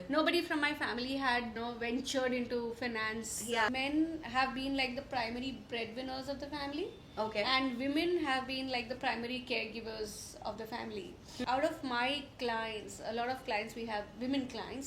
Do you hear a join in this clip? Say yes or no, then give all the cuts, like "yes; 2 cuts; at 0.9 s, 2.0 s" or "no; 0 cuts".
yes; 3 cuts; at 1.5 s, 3.7 s, 11.2 s